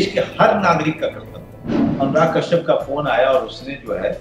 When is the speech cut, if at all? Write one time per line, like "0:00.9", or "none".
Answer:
0:01.9